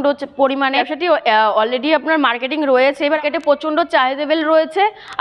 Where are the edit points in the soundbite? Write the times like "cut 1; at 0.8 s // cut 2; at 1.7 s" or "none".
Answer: cut 1; at 0.9 s // cut 2; at 3.2 s